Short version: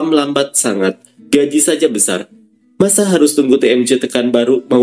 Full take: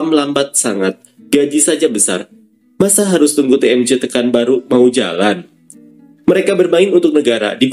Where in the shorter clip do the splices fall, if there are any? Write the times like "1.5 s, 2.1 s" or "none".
none

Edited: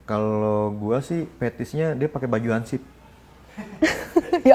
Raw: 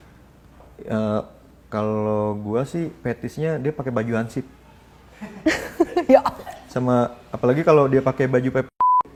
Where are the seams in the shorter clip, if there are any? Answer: none

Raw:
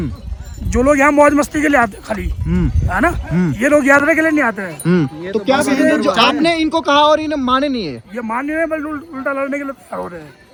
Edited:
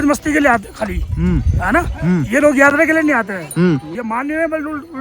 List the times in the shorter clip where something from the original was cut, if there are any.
3.9 s

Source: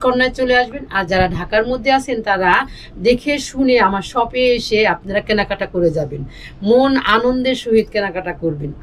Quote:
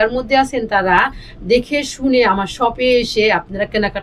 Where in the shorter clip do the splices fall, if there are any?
none

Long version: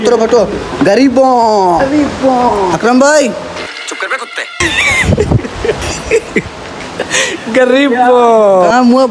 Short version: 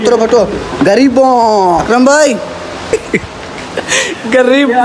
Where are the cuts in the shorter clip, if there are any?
1.8 s, 2.9 s

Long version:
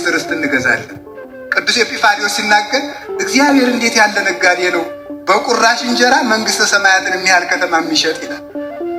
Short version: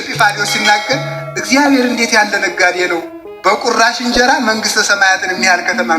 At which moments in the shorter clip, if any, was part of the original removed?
none

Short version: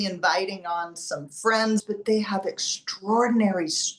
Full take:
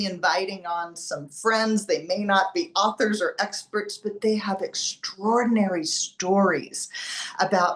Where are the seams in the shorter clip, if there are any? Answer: 1.8 s

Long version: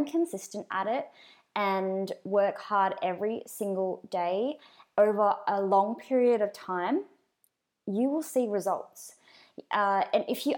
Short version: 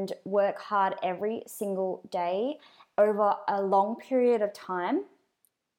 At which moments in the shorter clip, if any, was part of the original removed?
none

